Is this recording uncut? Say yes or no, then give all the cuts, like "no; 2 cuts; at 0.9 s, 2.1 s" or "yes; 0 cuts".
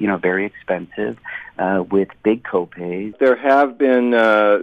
no; 1 cut; at 3.2 s